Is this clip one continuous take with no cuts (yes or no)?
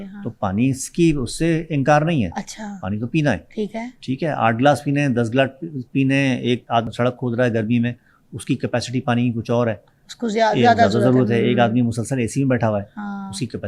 no